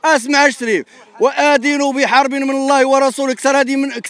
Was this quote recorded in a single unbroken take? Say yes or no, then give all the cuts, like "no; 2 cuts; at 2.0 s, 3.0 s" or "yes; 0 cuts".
yes; 0 cuts